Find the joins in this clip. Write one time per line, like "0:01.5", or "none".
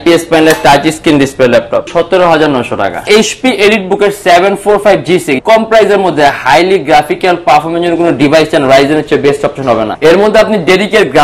0:01.9
0:03.1
0:05.4
0:09.9